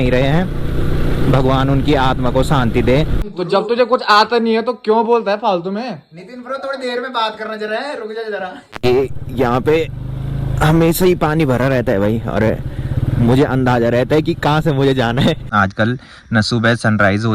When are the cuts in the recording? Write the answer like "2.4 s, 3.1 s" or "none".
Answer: 3.2 s, 8.6 s, 15.4 s